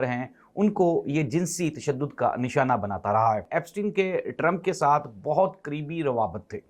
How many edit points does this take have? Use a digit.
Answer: 1